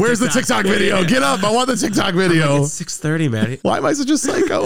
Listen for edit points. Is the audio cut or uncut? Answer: cut